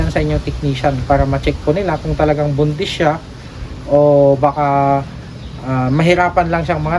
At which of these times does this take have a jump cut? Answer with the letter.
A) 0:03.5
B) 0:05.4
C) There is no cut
C